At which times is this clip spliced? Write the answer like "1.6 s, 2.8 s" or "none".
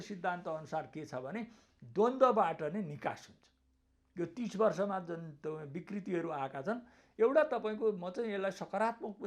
none